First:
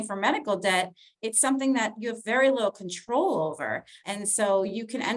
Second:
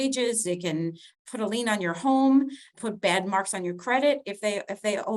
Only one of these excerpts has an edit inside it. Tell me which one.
second; 1 cut; at 2.8 s

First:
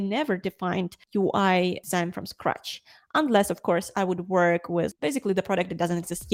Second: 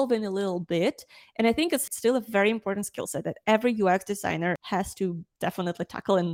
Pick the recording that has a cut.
second; 1 cut; at 4.6 s

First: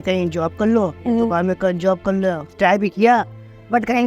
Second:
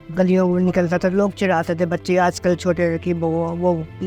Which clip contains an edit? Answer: first; 1 cut; at 2.5 s

